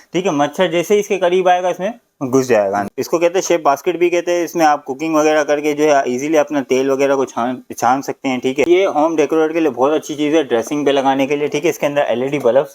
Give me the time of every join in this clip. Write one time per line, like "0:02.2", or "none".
0:02.9
0:08.7